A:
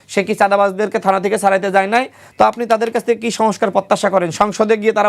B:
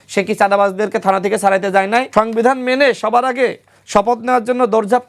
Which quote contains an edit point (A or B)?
B